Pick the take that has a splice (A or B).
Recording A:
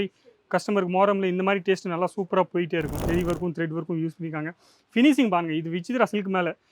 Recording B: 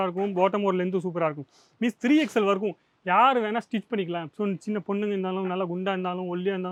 A